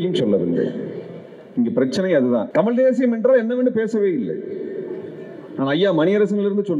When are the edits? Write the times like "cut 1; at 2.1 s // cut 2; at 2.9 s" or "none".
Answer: cut 1; at 2.5 s